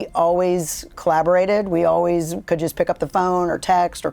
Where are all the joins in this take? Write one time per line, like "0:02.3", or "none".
none